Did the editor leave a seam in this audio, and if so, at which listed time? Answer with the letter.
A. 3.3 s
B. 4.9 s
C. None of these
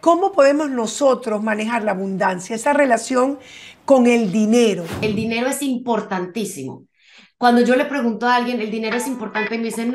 B